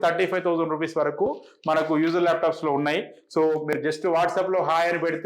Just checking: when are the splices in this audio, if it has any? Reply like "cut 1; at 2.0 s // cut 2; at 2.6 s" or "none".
cut 1; at 3.2 s